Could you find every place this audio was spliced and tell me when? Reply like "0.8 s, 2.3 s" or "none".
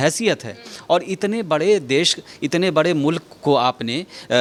none